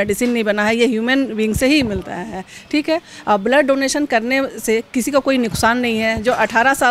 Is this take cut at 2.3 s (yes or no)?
no